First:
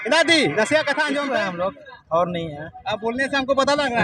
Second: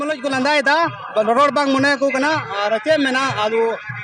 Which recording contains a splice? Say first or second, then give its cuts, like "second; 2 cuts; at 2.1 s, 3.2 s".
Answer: first; 1 cut; at 1.3 s